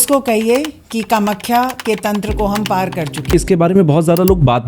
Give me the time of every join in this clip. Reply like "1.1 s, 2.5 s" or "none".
3.3 s